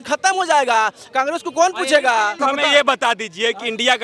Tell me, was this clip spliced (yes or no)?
yes